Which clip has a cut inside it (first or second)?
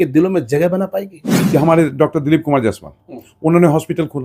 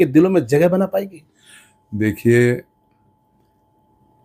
first